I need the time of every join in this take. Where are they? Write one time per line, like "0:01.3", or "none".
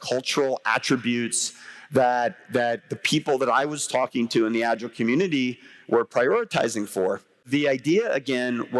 0:07.4